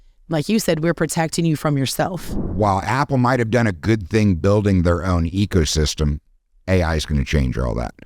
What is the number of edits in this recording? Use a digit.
1